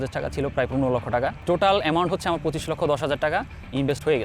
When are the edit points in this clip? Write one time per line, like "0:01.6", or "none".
0:01.4